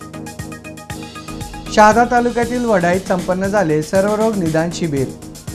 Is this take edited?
yes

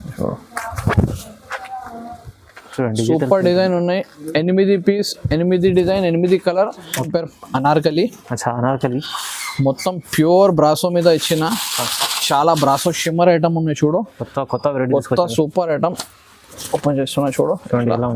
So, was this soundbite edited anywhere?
yes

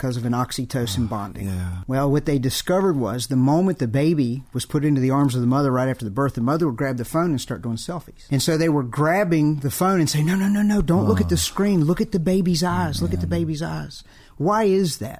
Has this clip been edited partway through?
yes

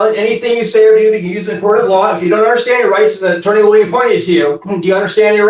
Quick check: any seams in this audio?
no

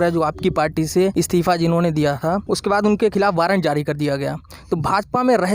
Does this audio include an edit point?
yes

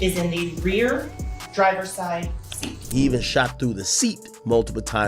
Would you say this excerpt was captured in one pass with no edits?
no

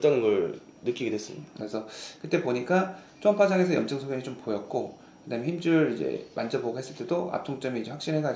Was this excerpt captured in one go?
no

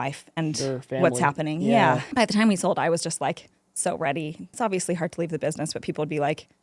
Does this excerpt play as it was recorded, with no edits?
no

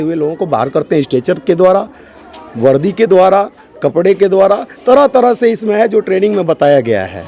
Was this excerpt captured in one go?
yes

